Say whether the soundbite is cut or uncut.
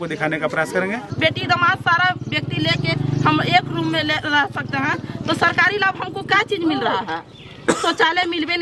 cut